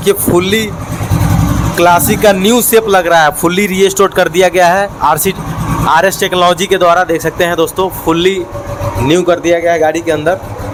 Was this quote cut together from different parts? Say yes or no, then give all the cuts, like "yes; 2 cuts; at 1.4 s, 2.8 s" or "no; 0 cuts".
no; 0 cuts